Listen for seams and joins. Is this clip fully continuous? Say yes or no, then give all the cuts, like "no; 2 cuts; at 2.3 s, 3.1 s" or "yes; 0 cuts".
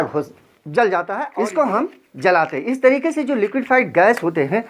no; 1 cut; at 1.2 s